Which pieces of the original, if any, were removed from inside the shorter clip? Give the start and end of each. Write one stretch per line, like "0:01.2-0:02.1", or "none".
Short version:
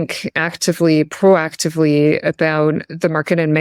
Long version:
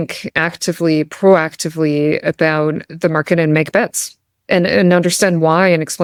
none